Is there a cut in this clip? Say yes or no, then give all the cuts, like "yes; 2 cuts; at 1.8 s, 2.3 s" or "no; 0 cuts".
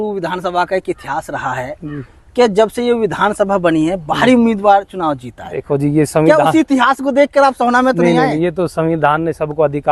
no; 0 cuts